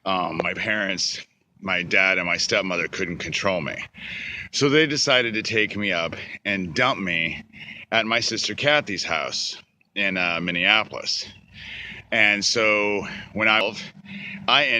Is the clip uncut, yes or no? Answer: no